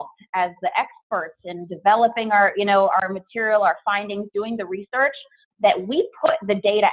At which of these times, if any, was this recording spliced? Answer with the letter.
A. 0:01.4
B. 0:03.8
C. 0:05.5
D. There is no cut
D